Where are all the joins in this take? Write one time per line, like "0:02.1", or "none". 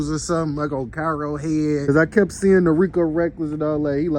0:01.9

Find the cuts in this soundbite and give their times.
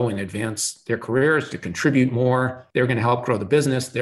0:02.6

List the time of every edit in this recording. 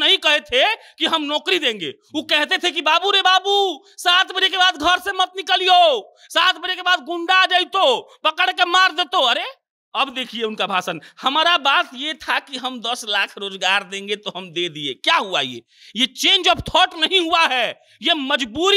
none

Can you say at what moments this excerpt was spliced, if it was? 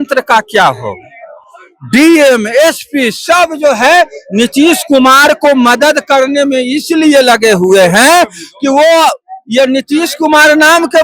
none

